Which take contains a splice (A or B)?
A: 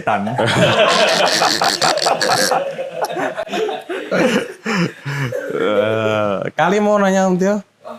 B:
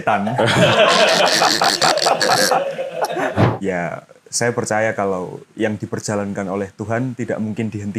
B